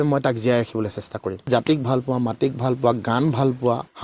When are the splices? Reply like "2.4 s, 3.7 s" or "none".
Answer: 1.4 s